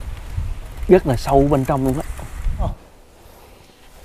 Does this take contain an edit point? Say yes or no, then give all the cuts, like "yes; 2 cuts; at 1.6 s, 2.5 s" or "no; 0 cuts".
yes; 1 cut; at 2.7 s